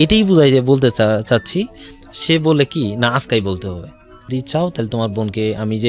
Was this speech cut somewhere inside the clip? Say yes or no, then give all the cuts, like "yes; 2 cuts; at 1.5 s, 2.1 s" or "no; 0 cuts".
yes; 1 cut; at 4.3 s